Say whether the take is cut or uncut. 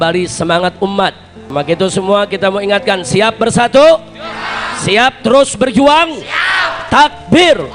cut